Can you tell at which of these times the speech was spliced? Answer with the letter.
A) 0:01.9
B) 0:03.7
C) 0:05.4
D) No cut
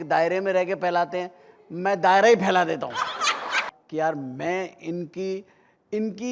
B